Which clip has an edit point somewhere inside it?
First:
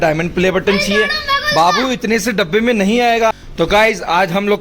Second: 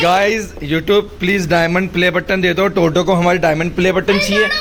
first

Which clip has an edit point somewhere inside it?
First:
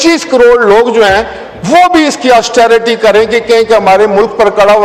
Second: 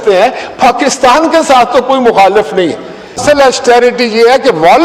second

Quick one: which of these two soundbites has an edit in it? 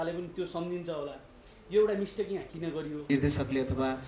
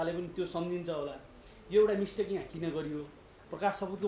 first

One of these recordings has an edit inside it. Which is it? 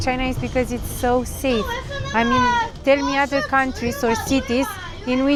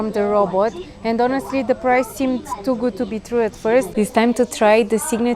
second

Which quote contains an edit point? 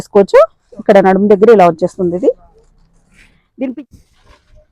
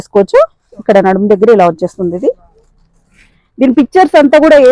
first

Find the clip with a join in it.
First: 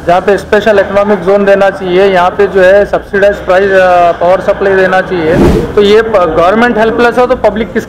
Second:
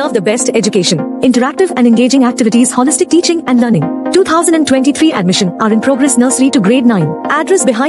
first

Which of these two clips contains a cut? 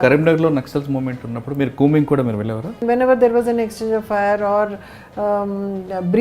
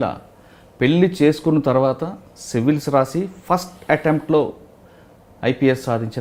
first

